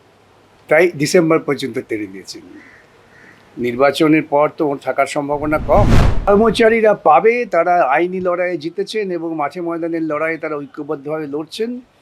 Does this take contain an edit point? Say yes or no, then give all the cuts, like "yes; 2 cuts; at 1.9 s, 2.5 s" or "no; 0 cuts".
yes; 1 cut; at 6.3 s